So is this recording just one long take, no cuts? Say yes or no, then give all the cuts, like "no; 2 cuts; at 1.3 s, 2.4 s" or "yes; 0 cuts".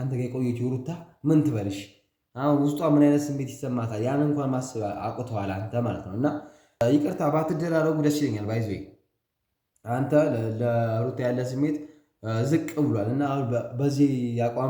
no; 1 cut; at 6.8 s